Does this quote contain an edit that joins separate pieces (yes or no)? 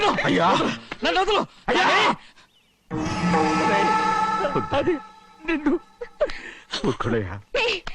no